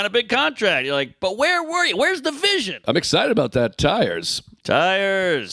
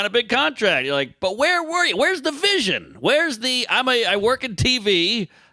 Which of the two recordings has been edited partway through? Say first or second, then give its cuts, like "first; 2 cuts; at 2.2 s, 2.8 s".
first; 1 cut; at 2.7 s